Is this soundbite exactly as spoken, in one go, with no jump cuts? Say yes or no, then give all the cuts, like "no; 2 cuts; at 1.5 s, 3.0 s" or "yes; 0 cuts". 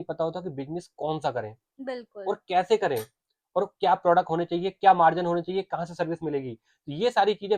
yes; 0 cuts